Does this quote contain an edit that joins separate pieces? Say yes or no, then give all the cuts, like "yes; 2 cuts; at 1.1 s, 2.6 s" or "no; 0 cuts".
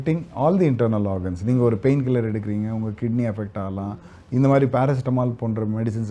no; 0 cuts